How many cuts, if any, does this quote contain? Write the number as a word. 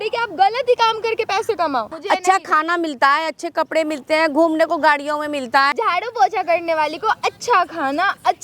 two